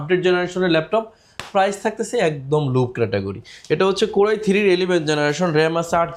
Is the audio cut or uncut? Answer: uncut